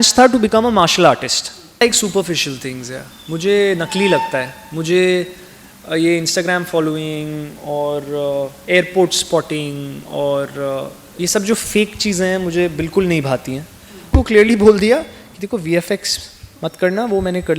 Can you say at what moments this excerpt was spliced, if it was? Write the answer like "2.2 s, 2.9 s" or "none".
1.8 s, 14.1 s